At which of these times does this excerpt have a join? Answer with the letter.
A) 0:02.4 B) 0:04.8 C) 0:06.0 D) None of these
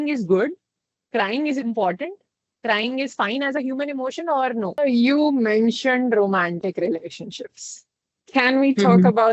B